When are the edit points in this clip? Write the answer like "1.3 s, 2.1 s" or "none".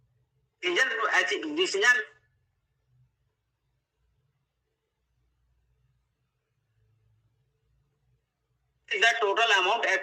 none